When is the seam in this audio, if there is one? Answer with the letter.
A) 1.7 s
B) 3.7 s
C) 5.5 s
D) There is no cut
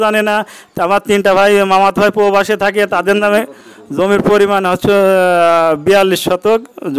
D